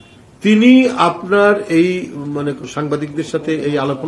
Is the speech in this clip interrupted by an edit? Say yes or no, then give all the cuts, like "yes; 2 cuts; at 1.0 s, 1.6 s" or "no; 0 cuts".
yes; 1 cut; at 2.7 s